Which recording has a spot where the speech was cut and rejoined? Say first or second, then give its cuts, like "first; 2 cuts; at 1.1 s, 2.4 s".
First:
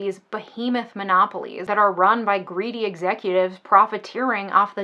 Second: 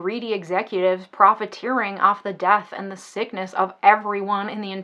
first; 1 cut; at 1.6 s